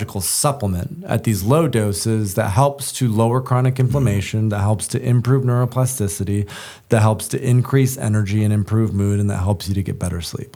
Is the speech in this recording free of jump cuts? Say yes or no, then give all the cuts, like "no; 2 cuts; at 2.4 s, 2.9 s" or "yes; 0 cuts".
yes; 0 cuts